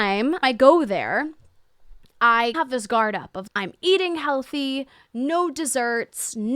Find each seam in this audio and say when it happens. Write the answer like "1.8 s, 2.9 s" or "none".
2.5 s